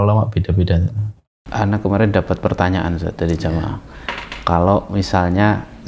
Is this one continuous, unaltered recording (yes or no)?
no